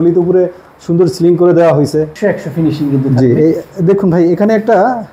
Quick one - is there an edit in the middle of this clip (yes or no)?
yes